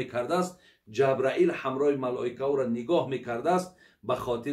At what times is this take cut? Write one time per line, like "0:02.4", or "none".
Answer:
none